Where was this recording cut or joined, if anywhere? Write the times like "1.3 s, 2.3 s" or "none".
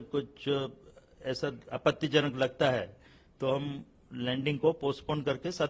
none